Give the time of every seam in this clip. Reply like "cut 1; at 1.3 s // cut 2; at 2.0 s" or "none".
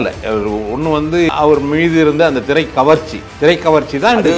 cut 1; at 1.3 s